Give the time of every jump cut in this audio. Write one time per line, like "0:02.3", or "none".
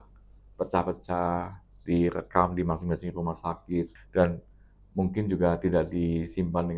0:04.0